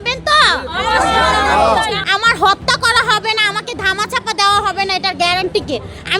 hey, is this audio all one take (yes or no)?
no